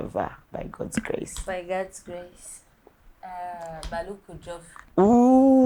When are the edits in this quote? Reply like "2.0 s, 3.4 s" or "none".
none